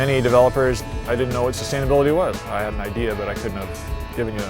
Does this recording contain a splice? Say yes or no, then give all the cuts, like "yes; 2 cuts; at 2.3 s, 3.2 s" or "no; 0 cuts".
yes; 2 cuts; at 0.8 s, 2.4 s